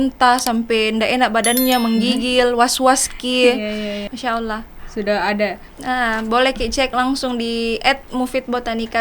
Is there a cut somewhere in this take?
yes; 1 cut; at 4.0 s

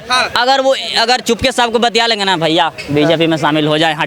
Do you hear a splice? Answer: no; 0 cuts

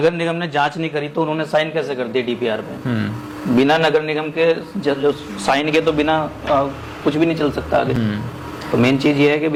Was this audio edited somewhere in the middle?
no; 0 cuts

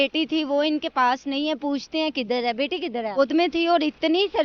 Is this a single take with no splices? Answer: no; 1 cut; at 3.2 s

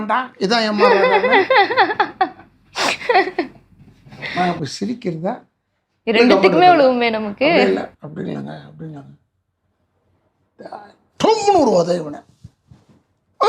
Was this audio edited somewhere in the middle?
no; 0 cuts

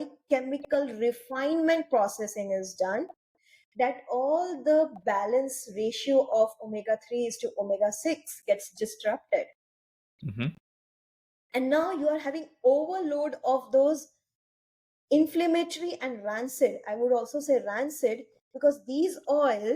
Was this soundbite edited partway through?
no; 0 cuts

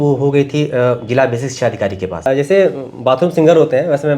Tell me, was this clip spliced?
yes; 1 cut; at 2.3 s

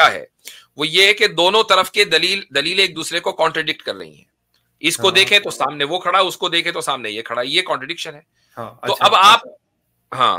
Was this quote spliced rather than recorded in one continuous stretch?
no; 0 cuts

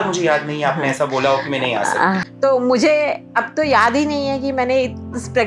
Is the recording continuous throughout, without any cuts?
no; 1 cut; at 2.2 s

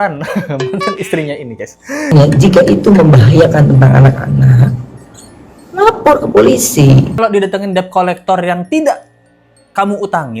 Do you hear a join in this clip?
yes; 2 cuts; at 2.1 s, 7.2 s

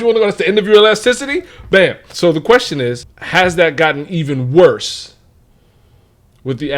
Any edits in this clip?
yes; 2 cuts; at 2.1 s, 3.1 s

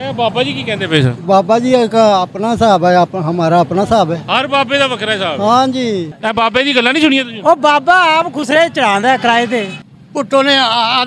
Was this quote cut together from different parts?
yes; 2 cuts; at 6.1 s, 9.8 s

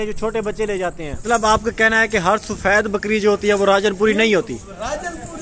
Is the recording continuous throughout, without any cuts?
no; 1 cut; at 1.2 s

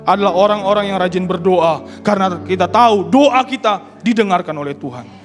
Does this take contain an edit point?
no; 0 cuts

